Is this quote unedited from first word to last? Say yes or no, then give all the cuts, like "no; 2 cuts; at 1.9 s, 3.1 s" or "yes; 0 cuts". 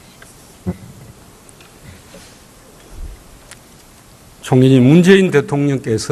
yes; 0 cuts